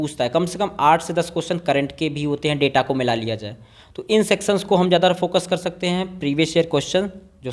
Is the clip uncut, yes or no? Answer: yes